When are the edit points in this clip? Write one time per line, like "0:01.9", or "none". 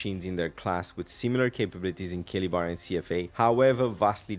0:03.3

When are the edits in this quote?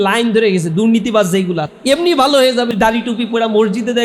0:01.7
0:02.7

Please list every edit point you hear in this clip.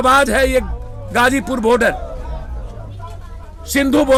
none

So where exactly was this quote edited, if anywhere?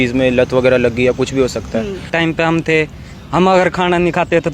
0:02.1

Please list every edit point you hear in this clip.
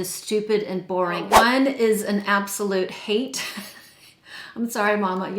0:01.3

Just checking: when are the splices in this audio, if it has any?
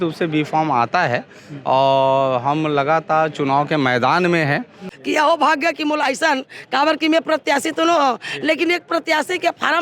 0:04.9

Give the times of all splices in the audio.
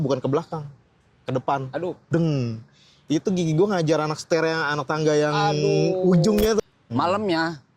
0:06.6

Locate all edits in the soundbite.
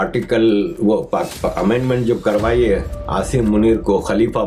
none

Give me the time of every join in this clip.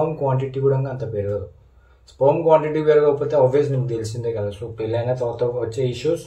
none

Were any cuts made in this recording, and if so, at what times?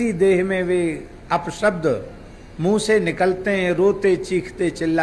none

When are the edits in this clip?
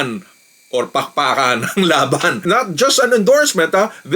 0:02.4

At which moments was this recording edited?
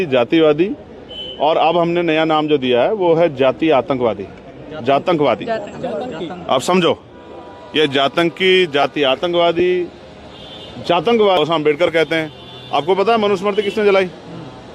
0:11.4

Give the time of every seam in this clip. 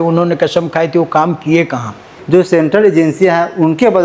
0:02.2

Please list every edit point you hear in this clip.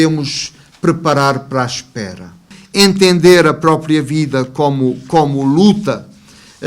0:02.6

